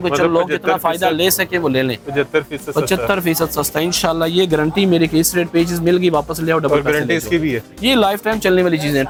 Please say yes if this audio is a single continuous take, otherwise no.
yes